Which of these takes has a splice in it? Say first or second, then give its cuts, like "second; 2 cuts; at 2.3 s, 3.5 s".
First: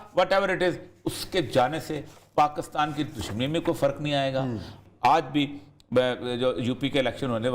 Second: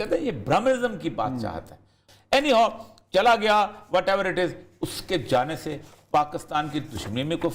first; 1 cut; at 4.7 s